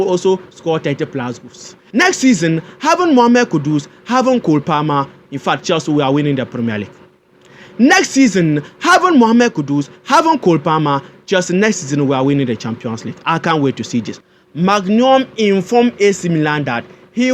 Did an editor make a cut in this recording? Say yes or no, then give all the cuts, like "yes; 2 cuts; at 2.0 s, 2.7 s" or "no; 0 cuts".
yes; 1 cut; at 14.1 s